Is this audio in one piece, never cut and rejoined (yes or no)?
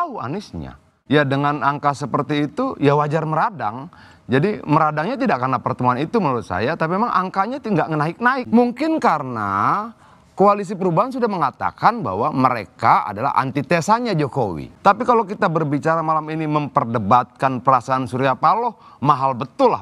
no